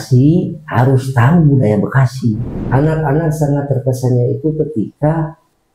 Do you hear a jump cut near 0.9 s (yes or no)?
no